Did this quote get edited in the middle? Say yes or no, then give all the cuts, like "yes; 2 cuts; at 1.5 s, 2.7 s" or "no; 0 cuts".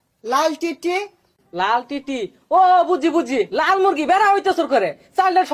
no; 0 cuts